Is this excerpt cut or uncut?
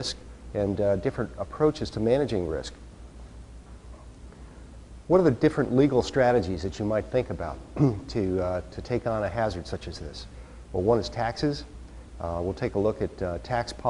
cut